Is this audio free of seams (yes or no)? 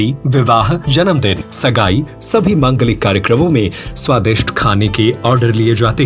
no